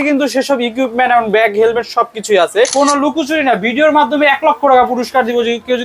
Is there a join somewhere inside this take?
yes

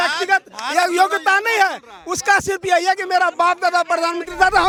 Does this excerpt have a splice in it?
no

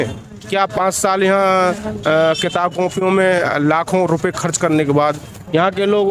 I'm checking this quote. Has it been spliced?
no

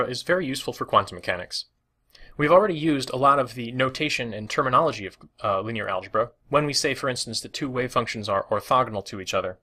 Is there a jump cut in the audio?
no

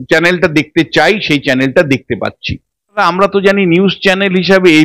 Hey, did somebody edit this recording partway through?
yes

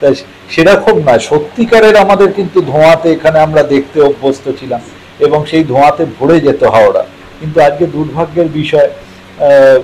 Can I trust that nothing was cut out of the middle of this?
yes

